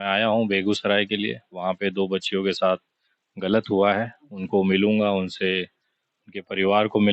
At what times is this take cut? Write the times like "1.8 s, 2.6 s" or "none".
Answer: none